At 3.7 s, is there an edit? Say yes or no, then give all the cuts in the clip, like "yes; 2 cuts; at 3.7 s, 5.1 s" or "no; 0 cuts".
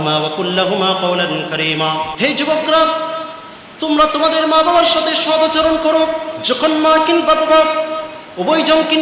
no; 2 cuts; at 2.1 s, 6.3 s